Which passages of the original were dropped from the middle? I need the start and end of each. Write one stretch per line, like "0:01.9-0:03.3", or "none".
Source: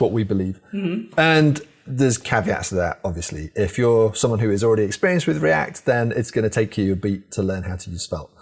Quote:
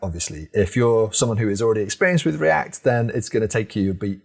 none